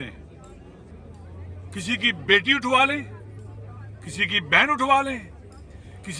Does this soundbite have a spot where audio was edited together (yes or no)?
no